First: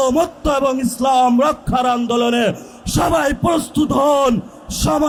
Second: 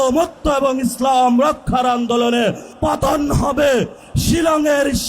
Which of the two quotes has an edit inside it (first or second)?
second